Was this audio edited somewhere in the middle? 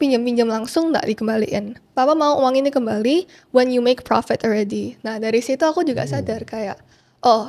no; 0 cuts

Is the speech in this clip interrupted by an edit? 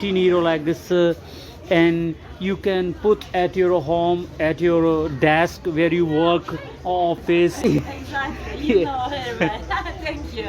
yes; 1 cut; at 7.6 s

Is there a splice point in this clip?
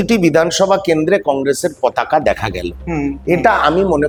no; 0 cuts

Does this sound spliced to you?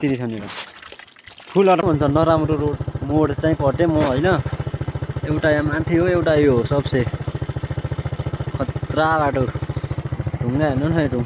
yes; 1 cut; at 1.8 s

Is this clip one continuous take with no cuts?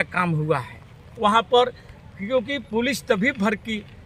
yes; 0 cuts

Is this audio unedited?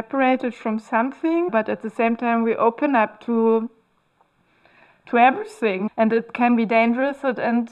no; 2 cuts; at 1.5 s, 5.9 s

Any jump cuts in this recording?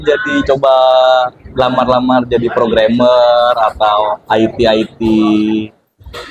no; 0 cuts

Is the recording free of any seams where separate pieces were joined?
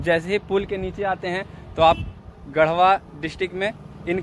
yes; 0 cuts

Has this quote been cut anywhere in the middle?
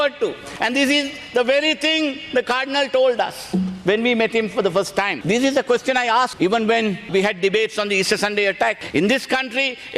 yes; 3 cuts; at 5.2 s, 6.3 s, 8.8 s

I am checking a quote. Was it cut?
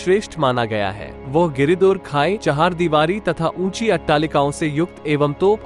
yes; 1 cut; at 2.4 s

